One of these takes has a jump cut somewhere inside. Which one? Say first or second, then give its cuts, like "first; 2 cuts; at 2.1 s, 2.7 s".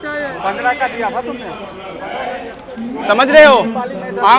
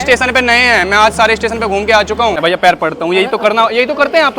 second; 1 cut; at 2.4 s